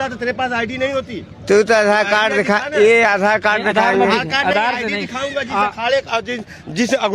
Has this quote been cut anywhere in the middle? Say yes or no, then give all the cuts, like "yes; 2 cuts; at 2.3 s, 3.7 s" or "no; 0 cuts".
no; 0 cuts